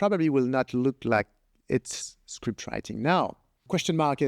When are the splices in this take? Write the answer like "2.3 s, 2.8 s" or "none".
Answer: none